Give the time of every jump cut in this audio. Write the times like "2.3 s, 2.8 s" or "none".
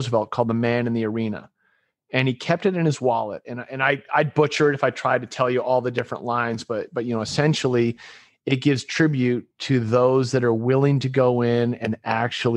none